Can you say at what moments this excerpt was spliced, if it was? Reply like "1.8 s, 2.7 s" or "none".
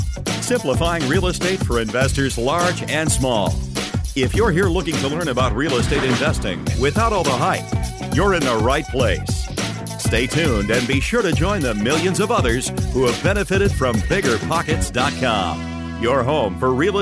none